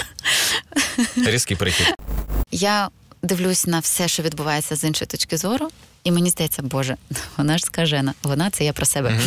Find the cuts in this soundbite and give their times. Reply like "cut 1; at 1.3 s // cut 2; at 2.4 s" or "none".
cut 1; at 2.1 s